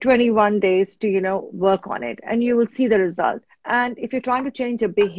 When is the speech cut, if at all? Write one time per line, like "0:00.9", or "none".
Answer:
0:01.5
0:03.5